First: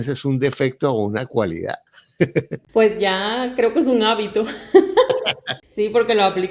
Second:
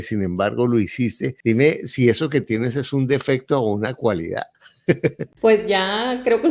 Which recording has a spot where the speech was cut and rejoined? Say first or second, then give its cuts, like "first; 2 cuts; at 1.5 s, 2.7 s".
first; 1 cut; at 5.5 s